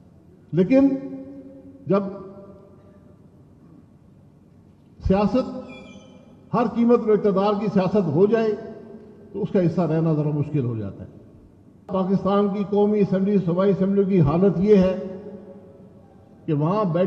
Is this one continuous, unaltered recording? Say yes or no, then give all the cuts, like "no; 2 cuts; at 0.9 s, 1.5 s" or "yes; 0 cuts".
no; 1 cut; at 11.9 s